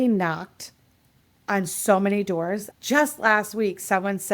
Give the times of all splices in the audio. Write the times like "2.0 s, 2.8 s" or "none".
2.7 s